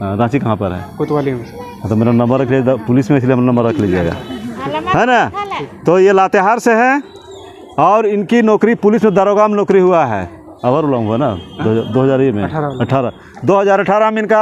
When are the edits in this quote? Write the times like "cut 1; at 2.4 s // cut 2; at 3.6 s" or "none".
none